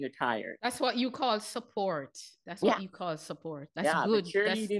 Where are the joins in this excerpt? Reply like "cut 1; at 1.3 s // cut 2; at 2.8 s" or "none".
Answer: none